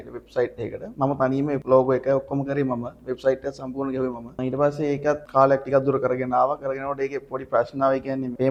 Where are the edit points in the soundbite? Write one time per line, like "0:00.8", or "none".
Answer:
none